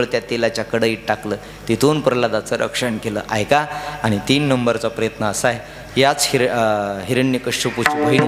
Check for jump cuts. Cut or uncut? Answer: uncut